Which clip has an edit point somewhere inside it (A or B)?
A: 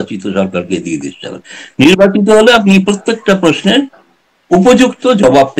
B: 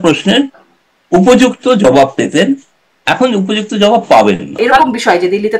B